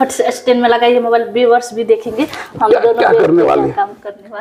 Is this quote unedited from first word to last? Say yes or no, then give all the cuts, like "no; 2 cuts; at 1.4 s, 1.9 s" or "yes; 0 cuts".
yes; 0 cuts